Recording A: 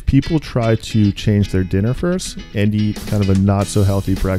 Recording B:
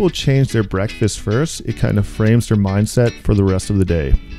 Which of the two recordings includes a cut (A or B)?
A